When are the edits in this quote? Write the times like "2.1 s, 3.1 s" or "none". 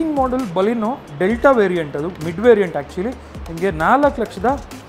none